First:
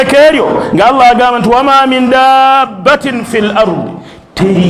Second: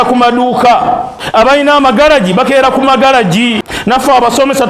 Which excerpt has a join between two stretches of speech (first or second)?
second